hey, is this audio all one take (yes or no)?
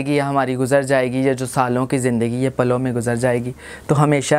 yes